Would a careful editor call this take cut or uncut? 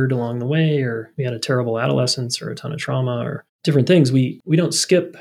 cut